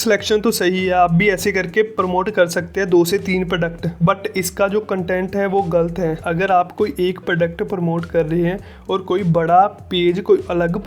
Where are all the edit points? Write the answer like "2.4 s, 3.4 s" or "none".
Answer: 6.2 s